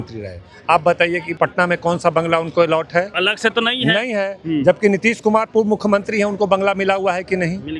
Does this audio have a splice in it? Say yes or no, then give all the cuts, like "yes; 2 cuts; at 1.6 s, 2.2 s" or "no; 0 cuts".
yes; 2 cuts; at 1.3 s, 3.1 s